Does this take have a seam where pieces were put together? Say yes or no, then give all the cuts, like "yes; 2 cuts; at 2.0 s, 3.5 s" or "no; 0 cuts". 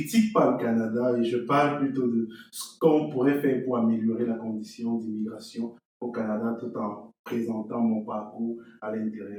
no; 0 cuts